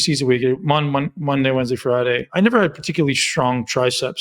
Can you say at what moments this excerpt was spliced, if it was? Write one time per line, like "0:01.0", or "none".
0:02.3